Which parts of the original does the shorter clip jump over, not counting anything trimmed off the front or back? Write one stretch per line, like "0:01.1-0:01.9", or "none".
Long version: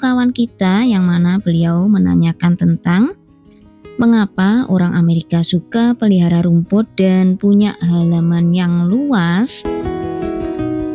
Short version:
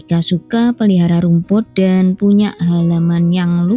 none